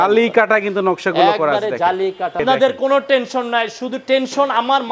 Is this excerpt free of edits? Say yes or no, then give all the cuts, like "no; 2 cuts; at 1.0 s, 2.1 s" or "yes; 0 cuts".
no; 1 cut; at 2.4 s